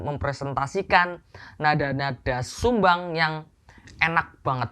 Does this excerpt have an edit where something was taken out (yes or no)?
no